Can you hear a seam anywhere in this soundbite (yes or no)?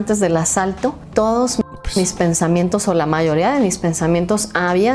no